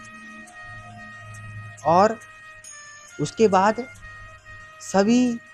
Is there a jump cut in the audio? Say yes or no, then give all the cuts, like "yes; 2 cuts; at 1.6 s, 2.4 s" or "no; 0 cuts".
no; 0 cuts